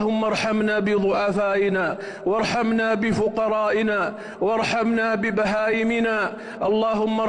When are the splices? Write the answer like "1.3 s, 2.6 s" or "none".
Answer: none